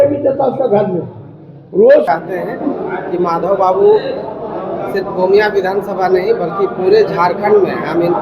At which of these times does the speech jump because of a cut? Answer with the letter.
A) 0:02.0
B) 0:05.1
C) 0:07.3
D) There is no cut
A